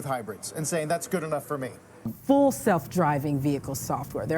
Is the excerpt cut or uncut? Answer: cut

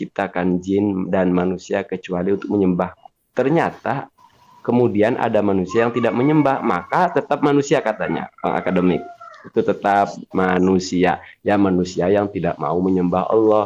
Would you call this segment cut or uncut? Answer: uncut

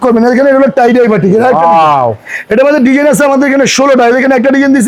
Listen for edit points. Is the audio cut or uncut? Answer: uncut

